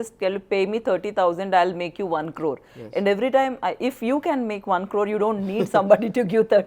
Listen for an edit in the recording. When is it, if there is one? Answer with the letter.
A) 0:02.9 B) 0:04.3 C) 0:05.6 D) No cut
D